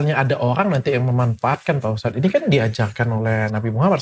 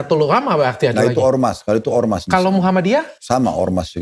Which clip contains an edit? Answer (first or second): second